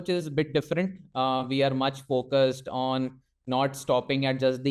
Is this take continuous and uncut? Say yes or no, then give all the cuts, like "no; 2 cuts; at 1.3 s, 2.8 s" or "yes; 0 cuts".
yes; 0 cuts